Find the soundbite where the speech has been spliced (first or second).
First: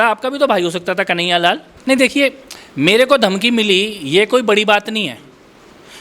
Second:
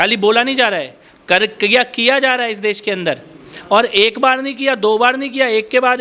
first